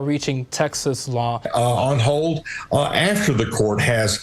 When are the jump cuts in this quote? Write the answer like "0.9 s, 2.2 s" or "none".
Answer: 1.4 s